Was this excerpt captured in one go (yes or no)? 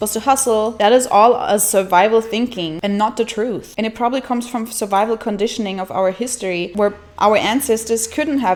yes